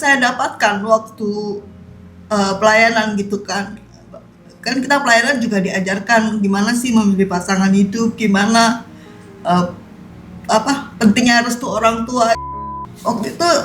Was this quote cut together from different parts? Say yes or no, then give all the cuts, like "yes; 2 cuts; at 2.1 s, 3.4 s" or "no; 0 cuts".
yes; 1 cut; at 12.5 s